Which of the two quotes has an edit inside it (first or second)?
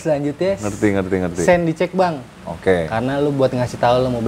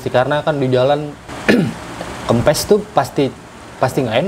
second